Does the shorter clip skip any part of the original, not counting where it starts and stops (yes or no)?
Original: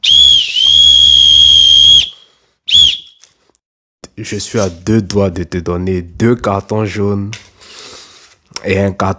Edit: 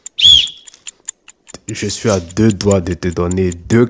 no